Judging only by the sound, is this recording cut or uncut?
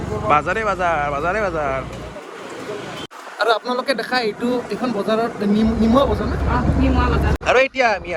uncut